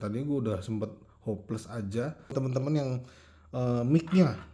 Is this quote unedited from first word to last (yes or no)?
no